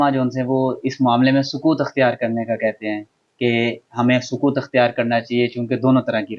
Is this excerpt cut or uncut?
uncut